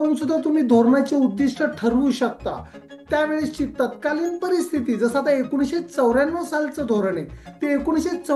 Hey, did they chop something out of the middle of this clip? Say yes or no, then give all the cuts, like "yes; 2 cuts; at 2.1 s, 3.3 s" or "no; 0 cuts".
yes; 1 cut; at 2.8 s